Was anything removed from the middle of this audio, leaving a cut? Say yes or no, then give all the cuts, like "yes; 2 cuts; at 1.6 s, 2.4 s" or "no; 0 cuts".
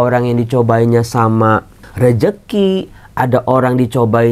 no; 0 cuts